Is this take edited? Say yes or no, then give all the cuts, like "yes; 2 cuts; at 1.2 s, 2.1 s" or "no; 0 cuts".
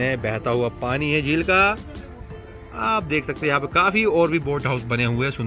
no; 0 cuts